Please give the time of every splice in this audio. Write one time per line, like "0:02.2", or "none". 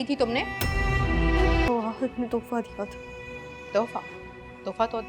0:01.7